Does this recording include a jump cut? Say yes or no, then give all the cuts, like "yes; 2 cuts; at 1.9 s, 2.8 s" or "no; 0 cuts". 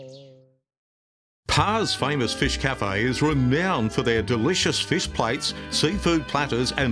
yes; 1 cut; at 1.3 s